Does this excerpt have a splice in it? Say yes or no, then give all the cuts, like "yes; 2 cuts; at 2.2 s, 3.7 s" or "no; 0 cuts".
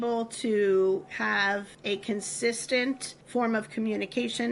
yes; 2 cuts; at 1.7 s, 3.1 s